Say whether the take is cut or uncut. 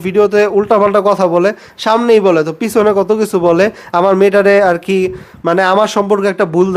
uncut